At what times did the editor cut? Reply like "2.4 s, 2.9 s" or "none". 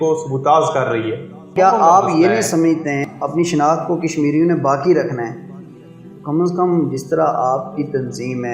1.5 s, 3.0 s